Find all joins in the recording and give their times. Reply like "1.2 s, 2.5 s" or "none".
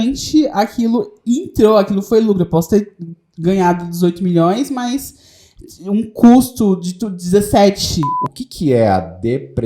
8.2 s